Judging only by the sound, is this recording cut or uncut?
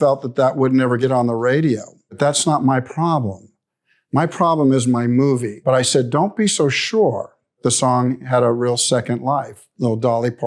cut